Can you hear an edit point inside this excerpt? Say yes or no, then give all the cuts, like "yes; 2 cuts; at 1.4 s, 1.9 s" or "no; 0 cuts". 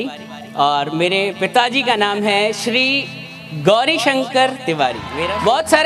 no; 0 cuts